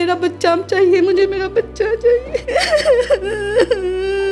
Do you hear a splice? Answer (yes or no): yes